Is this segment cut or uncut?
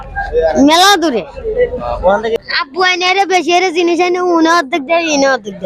cut